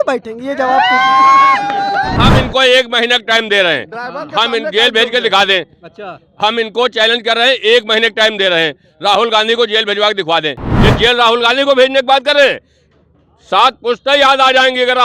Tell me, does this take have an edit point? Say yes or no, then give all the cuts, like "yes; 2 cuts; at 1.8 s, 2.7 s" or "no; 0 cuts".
yes; 2 cuts; at 2.2 s, 10.7 s